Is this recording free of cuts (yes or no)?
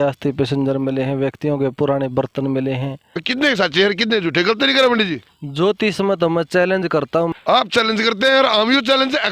no